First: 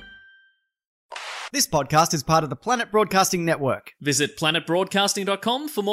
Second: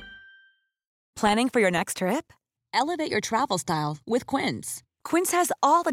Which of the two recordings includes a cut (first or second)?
first